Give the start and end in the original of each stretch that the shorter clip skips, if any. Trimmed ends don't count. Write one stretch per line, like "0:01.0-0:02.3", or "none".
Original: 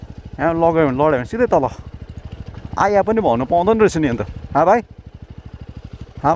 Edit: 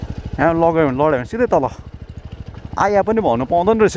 none